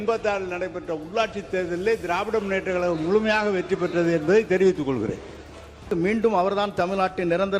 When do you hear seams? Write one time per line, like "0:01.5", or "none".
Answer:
0:05.9